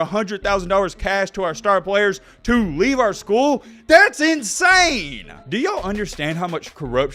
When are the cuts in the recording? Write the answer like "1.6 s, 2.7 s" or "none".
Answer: 5.3 s